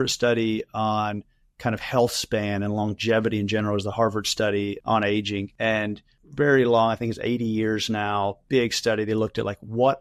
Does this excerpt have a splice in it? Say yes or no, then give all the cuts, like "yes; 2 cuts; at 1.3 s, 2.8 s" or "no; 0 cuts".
no; 0 cuts